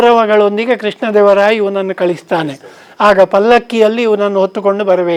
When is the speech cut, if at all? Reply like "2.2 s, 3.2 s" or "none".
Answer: none